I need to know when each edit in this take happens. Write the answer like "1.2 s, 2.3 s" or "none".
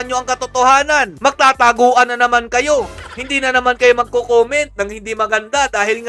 none